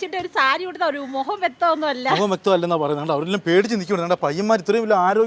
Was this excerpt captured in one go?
yes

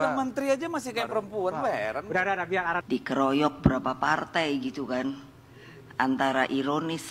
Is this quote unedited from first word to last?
no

